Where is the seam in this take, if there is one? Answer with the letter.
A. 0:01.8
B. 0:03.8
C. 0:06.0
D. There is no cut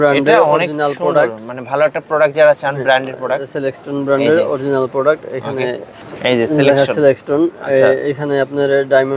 D